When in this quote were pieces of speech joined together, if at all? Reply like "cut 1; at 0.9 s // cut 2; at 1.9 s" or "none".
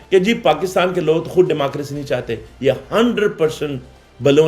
none